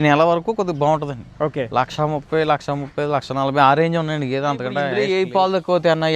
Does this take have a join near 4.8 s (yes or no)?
yes